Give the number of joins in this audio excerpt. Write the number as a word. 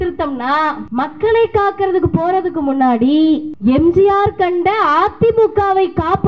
two